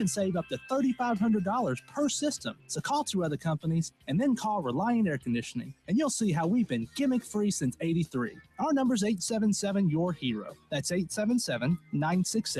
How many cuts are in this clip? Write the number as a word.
zero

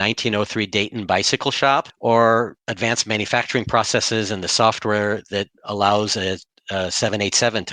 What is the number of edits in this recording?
two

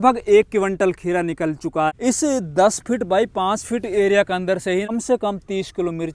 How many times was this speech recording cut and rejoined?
two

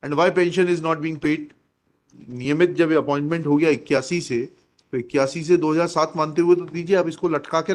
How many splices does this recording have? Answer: one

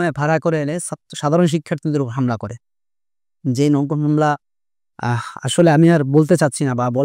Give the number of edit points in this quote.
zero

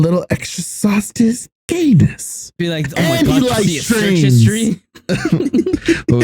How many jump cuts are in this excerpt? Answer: one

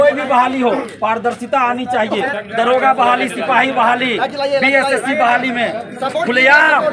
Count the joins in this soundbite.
one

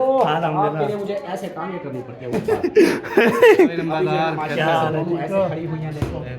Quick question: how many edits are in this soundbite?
one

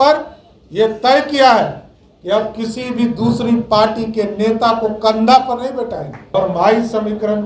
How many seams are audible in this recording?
one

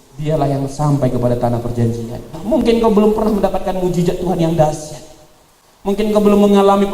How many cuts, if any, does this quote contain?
one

